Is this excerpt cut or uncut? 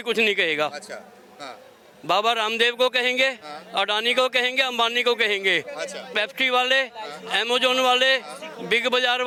uncut